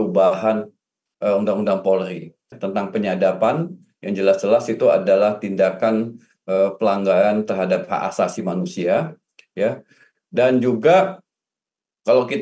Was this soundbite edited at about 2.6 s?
yes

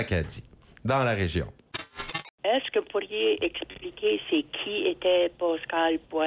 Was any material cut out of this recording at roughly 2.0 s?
yes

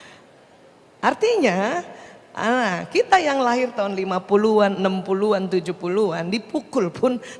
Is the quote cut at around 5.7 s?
no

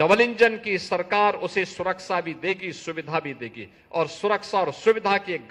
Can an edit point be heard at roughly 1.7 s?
no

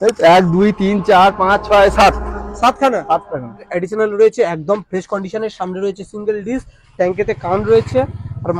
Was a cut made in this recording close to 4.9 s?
no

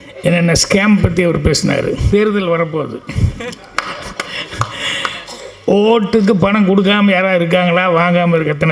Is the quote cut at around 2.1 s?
yes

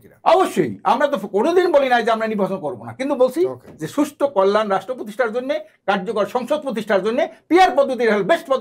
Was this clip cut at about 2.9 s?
no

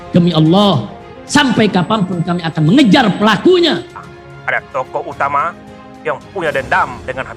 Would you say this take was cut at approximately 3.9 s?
yes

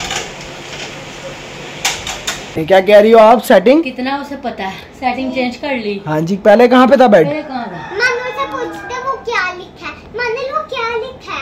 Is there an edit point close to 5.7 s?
no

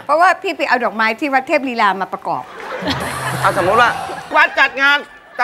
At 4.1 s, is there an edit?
yes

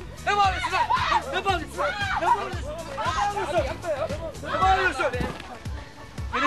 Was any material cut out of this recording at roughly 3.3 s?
no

